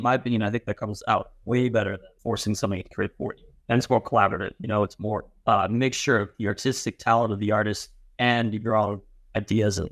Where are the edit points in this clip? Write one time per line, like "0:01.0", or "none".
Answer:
0:02.1
0:03.5
0:05.3